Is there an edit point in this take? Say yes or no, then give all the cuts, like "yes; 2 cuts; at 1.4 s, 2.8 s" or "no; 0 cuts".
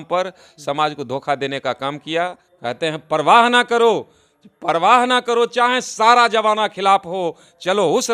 yes; 1 cut; at 2.5 s